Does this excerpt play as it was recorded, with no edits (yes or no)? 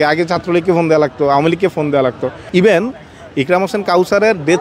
no